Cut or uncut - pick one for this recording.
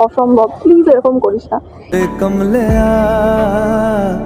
cut